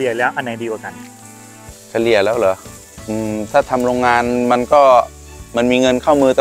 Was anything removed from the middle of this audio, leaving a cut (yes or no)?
no